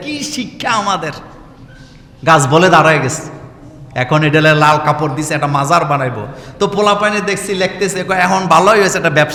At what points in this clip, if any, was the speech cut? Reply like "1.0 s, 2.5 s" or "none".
none